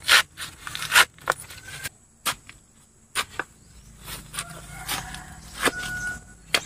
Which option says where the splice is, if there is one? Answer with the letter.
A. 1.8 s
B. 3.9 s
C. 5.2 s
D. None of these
A